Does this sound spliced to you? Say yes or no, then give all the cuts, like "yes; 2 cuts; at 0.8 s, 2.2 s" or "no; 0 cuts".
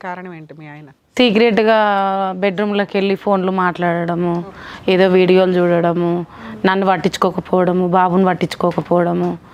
no; 0 cuts